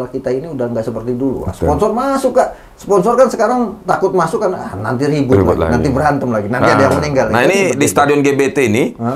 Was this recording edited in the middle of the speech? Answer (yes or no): no